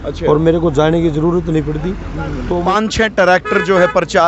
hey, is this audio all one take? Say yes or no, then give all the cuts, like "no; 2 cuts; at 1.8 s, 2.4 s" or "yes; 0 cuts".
no; 1 cut; at 2.6 s